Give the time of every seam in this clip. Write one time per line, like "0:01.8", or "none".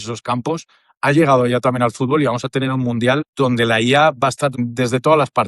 0:03.3